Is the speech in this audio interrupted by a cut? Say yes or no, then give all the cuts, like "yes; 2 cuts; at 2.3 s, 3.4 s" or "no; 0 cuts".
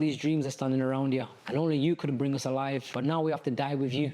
yes; 2 cuts; at 1.4 s, 2.9 s